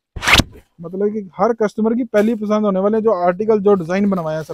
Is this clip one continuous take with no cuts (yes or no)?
yes